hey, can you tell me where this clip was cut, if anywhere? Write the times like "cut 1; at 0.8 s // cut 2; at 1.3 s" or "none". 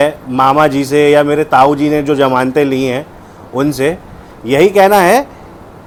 none